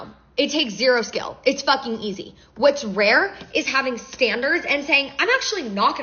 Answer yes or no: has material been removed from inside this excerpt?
no